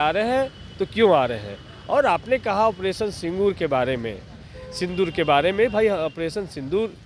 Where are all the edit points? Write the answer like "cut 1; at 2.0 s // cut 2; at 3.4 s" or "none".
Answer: none